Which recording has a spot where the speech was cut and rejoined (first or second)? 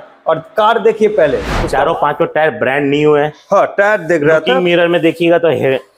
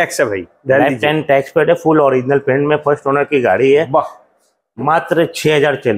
first